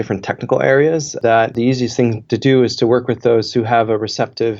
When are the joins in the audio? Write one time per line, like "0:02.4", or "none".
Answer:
0:01.1